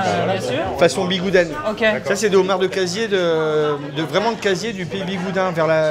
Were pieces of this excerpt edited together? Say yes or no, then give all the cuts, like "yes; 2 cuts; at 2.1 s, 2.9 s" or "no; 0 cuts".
no; 0 cuts